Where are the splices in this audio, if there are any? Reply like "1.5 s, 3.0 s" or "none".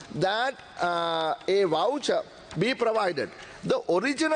none